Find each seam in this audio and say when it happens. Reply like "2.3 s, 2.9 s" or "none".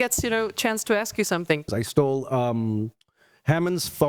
1.7 s